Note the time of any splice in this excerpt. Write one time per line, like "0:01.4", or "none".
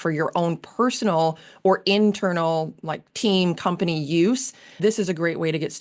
0:04.8